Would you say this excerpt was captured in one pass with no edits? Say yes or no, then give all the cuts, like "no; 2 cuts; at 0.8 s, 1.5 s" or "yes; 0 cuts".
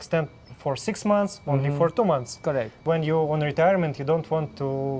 no; 1 cut; at 2.8 s